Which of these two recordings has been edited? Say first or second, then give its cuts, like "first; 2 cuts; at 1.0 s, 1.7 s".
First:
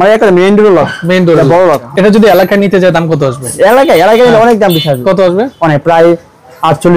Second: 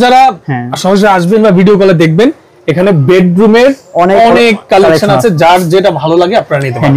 first; 2 cuts; at 1.9 s, 3.5 s